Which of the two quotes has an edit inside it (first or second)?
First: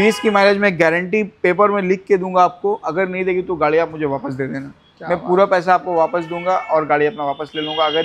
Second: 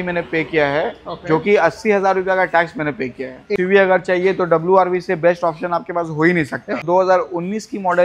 second